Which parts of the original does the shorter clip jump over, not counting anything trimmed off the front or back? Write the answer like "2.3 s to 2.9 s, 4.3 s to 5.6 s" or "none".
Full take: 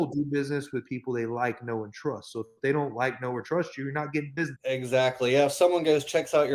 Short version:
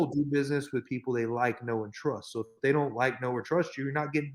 none